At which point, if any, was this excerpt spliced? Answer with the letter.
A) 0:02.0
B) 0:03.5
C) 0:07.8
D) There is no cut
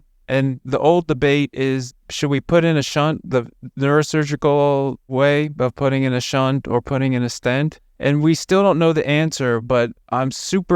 C